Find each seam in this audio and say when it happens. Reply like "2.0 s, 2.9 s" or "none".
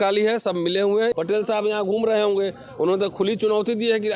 1.1 s